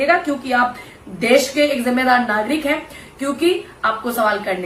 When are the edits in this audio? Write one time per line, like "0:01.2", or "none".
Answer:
none